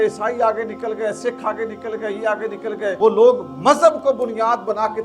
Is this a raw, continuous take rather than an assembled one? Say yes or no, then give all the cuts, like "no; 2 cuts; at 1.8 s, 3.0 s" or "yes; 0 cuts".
no; 1 cut; at 3.0 s